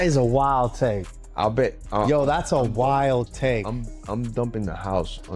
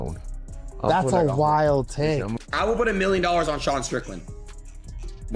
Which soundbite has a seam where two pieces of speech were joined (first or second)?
second